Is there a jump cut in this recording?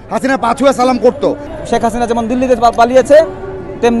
yes; 1 cut; at 1.5 s

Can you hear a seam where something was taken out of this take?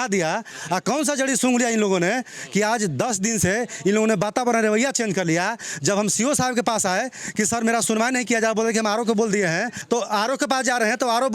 yes; 1 cut; at 9.8 s

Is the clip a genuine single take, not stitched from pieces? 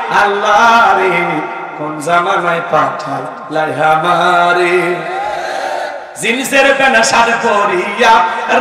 yes; 0 cuts

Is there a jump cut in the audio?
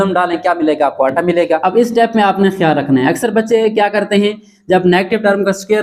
yes; 1 cut; at 1.6 s

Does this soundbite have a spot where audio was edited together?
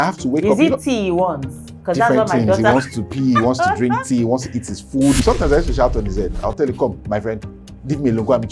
yes; 1 cut; at 5.2 s

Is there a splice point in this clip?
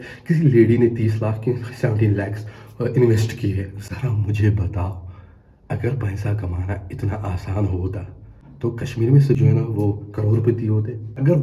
no; 0 cuts

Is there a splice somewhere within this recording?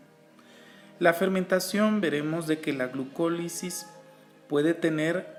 no; 0 cuts

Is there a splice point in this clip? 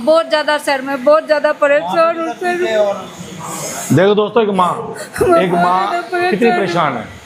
no; 0 cuts

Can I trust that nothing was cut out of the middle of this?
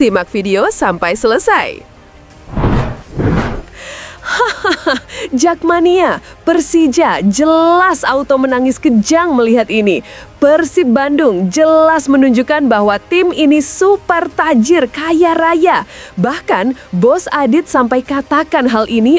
no; 1 cut; at 2.1 s

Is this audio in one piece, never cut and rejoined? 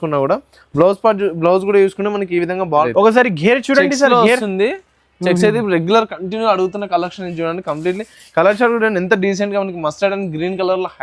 no; 1 cut; at 2.9 s

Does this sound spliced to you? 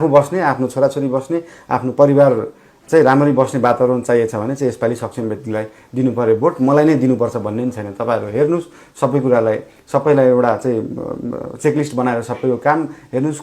no; 0 cuts

